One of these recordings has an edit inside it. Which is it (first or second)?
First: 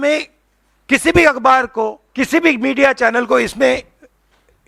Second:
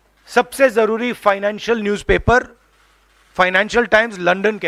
first